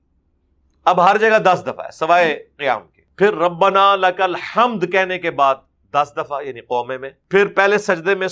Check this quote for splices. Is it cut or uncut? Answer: cut